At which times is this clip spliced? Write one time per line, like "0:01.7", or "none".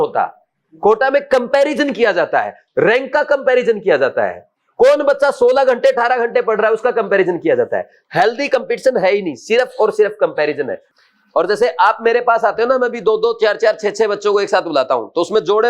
0:10.8